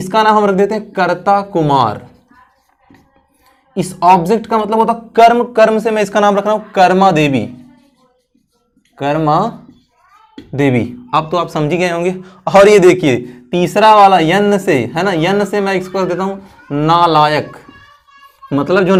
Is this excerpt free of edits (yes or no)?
yes